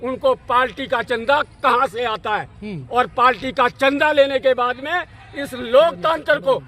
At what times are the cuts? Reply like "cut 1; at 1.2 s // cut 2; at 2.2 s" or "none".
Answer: none